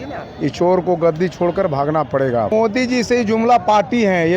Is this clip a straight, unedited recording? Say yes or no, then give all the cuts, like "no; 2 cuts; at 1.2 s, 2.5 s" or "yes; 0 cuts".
no; 1 cut; at 2.5 s